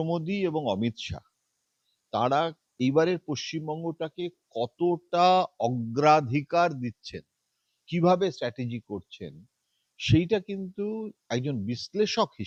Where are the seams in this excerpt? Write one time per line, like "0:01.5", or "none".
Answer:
none

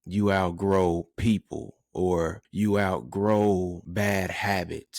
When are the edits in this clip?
0:02.4
0:03.8

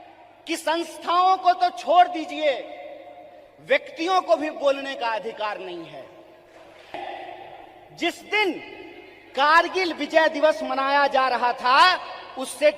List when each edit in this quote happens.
0:07.0

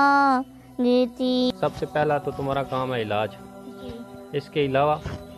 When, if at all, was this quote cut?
0:01.5

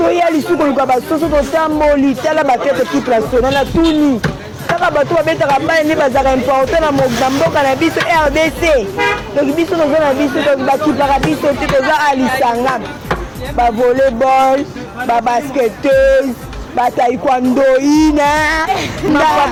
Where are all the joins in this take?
none

